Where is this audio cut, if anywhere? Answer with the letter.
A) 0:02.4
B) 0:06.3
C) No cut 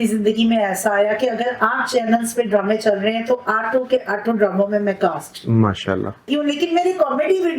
B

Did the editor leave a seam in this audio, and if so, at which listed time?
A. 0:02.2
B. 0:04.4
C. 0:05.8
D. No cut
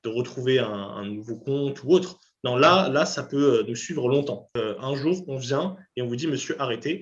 B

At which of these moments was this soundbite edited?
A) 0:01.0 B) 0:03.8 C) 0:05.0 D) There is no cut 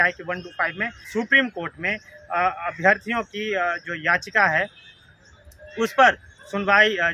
A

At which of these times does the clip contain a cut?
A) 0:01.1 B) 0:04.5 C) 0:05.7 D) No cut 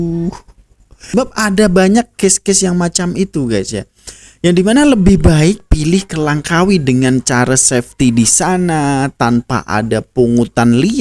A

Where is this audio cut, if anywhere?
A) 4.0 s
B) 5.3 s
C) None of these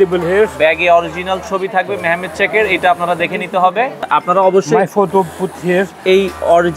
A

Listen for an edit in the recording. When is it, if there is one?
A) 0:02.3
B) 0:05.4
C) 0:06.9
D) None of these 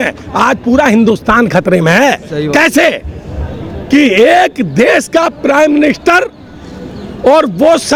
D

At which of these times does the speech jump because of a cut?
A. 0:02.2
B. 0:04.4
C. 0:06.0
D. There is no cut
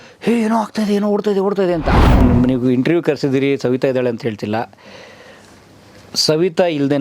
A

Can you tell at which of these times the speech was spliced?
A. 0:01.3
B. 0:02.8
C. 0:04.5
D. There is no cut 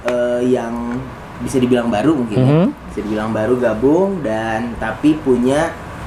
D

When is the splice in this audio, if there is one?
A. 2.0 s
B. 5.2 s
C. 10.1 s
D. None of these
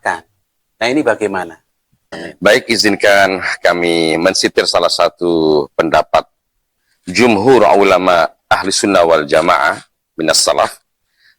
A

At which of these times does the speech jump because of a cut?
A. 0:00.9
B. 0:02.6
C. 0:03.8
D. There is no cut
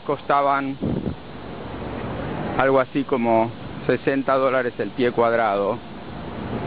D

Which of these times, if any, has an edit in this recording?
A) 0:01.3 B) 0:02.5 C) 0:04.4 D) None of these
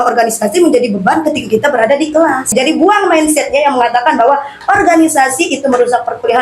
B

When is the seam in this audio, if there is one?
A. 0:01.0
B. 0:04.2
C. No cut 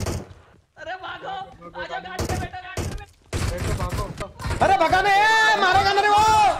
B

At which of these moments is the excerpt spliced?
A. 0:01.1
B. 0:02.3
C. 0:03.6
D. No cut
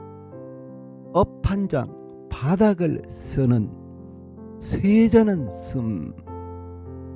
A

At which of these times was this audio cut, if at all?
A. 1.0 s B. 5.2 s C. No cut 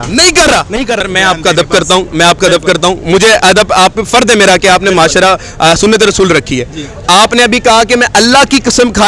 A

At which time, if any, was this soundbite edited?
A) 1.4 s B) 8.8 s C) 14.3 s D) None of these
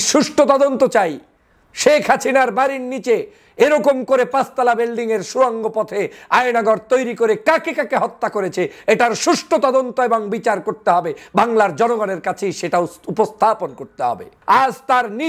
C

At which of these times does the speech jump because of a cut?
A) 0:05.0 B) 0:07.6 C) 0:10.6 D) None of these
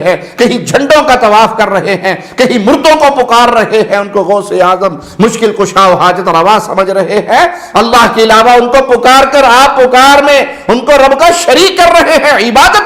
B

